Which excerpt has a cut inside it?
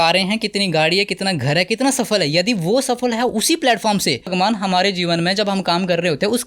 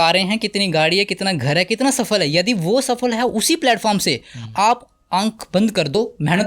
first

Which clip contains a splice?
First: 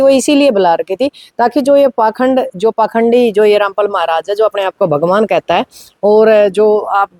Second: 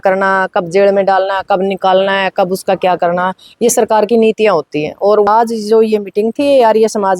second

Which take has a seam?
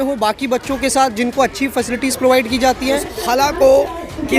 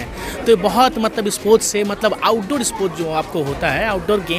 first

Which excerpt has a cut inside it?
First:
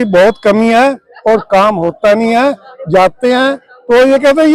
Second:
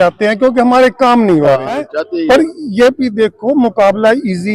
second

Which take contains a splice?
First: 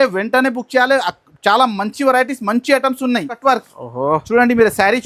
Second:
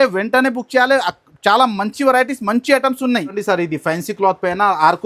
first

